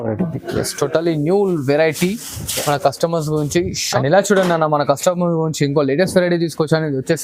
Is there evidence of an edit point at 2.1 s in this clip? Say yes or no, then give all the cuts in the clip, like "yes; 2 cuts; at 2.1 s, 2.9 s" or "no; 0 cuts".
no; 1 cut; at 3.8 s